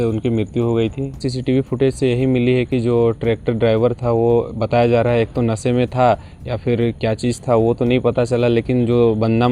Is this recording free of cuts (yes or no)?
no